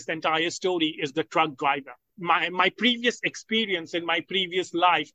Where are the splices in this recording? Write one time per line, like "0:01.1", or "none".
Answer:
0:02.1